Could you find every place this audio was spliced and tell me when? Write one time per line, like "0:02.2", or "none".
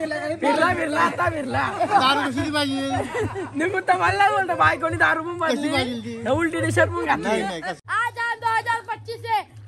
0:07.7